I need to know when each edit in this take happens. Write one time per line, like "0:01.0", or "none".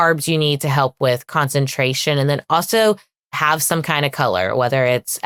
none